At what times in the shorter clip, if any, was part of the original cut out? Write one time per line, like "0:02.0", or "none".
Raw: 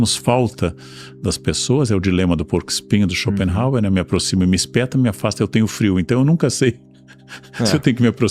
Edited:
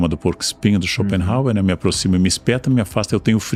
none